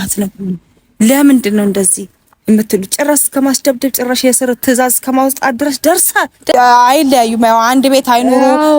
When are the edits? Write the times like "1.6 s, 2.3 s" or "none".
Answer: 6.5 s